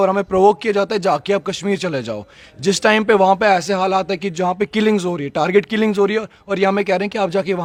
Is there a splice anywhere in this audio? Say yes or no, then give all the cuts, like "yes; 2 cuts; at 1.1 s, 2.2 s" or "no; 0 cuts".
no; 0 cuts